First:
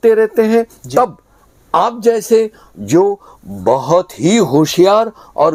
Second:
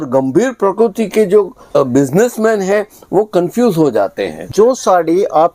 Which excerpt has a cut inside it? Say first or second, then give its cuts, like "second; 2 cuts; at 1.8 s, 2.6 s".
second; 2 cuts; at 1.8 s, 4.5 s